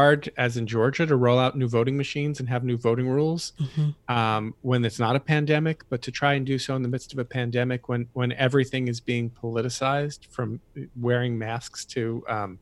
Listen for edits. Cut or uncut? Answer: uncut